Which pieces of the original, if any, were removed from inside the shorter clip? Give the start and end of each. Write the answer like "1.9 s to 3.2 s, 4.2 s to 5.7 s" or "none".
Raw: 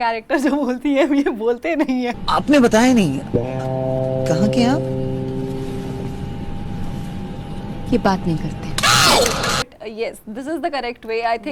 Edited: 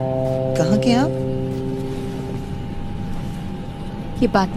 none